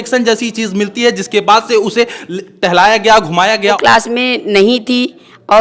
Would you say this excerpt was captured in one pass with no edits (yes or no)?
no